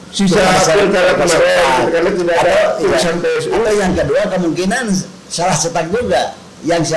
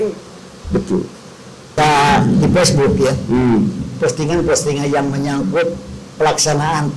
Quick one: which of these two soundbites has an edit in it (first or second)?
second